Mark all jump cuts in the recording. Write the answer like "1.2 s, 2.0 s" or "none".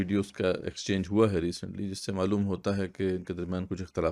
none

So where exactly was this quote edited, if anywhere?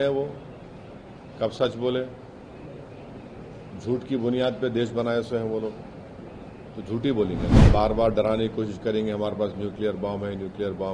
7.5 s

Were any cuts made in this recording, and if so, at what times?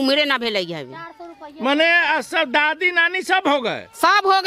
none

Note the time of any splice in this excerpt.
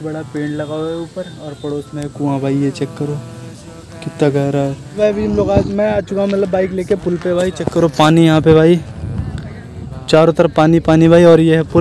4.8 s

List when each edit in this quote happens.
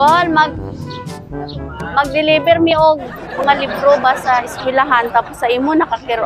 none

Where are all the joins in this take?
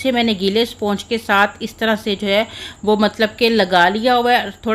none

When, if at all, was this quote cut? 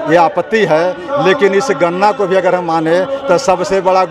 none

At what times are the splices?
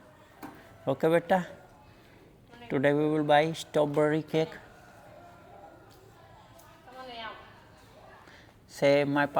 none

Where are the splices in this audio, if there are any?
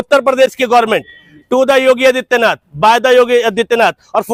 none

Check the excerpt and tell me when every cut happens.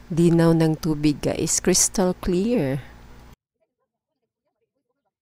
none

